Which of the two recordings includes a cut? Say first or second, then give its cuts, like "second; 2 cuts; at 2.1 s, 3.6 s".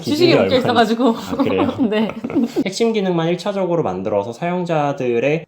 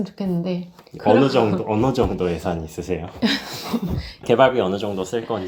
first; 1 cut; at 2.6 s